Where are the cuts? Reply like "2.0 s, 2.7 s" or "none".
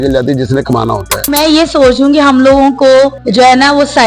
1.2 s, 3.2 s

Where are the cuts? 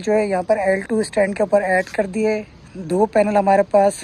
none

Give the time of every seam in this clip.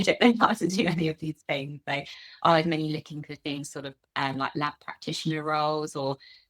none

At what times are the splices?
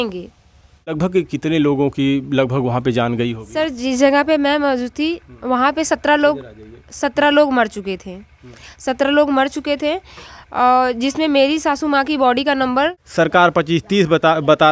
0.9 s, 13.0 s

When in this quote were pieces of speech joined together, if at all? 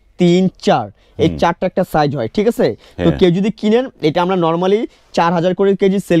none

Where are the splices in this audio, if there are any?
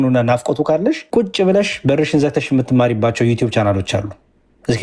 1.0 s

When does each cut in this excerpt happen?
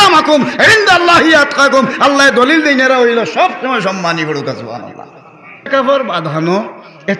5.7 s

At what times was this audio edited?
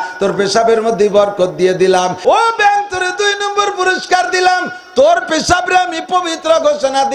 2.1 s

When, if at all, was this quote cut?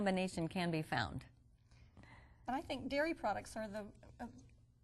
3.8 s

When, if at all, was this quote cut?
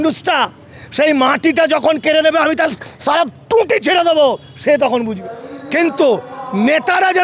5.2 s

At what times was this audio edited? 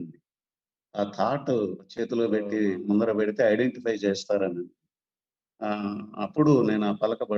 1.8 s

